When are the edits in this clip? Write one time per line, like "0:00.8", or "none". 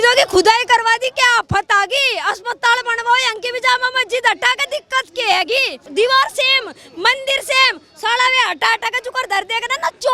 0:05.8